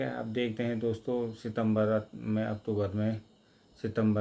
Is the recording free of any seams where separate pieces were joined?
yes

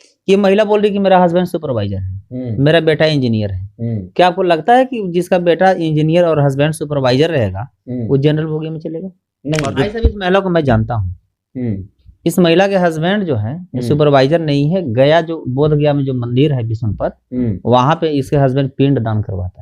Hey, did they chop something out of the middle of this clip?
yes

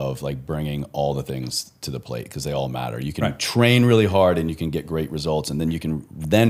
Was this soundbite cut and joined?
no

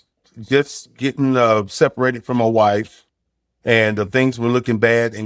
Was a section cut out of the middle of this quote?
no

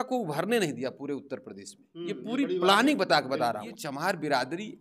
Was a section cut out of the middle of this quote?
yes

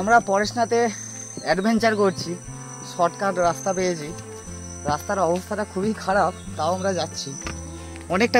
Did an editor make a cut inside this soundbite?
no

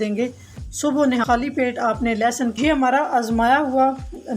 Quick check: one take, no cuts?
no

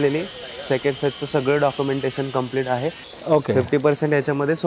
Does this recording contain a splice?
yes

